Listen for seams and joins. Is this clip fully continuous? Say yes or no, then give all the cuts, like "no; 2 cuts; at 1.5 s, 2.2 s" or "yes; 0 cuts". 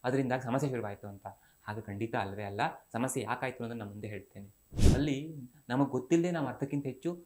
no; 1 cut; at 4.8 s